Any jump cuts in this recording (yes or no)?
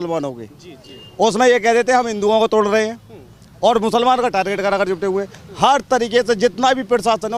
no